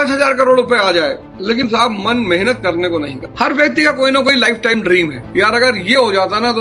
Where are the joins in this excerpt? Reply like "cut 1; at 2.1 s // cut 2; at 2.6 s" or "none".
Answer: cut 1; at 3.2 s